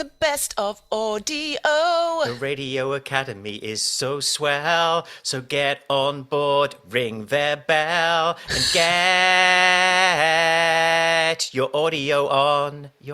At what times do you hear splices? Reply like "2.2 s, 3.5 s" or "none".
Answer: 2.3 s